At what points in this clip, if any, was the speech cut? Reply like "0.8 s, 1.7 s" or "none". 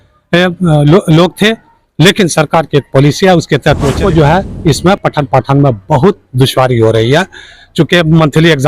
4.0 s